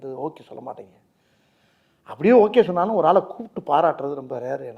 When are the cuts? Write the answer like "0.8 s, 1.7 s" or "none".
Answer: none

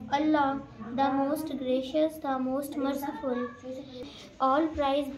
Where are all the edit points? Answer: 4.1 s

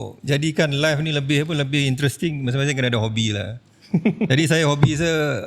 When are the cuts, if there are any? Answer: none

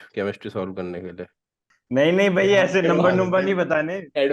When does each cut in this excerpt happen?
1.4 s

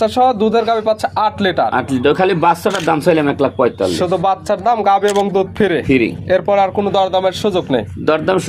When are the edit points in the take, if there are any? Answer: none

